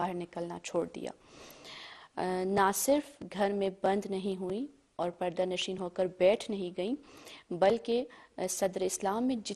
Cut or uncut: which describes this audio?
uncut